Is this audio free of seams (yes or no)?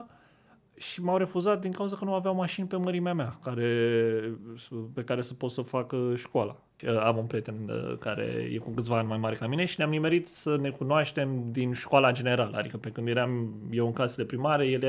no